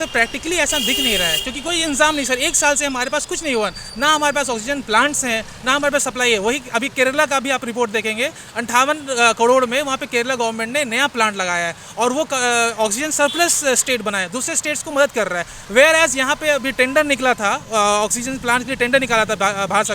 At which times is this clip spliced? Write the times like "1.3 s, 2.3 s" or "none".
none